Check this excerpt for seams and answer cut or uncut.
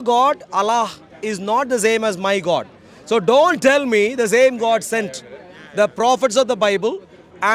uncut